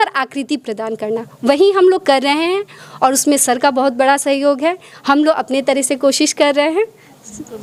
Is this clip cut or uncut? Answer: uncut